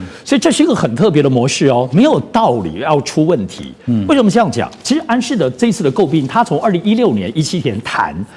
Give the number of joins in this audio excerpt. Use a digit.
0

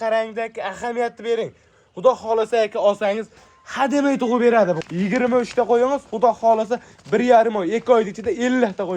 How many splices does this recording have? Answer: 1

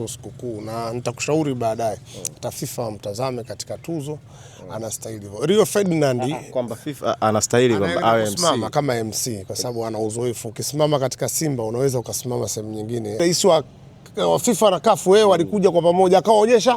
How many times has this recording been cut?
1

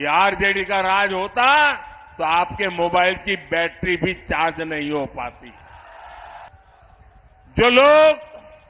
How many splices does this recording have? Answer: 1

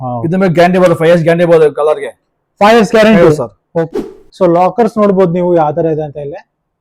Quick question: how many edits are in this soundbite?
1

